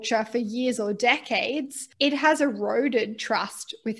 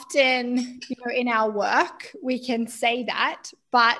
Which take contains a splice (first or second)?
first